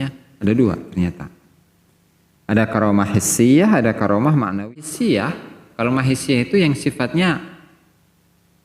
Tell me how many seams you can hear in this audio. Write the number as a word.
one